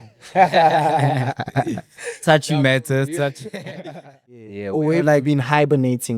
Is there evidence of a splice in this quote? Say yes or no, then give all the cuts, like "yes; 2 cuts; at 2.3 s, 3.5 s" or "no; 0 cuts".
yes; 1 cut; at 4.3 s